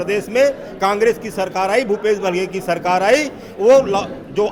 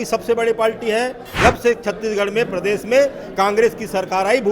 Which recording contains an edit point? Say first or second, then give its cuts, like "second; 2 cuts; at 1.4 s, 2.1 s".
second; 1 cut; at 1.3 s